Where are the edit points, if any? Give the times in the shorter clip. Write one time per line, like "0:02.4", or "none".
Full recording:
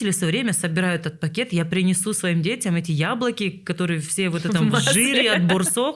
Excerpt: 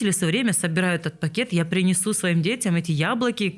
none